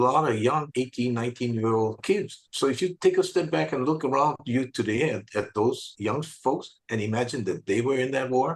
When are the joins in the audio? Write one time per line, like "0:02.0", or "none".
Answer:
none